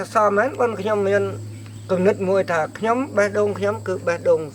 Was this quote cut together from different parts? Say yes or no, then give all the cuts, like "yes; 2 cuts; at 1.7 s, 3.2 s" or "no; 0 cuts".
no; 0 cuts